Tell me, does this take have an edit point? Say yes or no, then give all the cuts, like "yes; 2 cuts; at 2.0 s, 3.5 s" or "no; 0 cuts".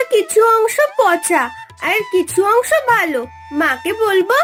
no; 0 cuts